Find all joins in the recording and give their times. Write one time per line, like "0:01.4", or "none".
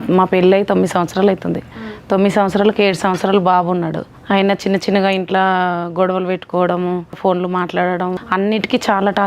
0:04.1
0:07.2
0:08.2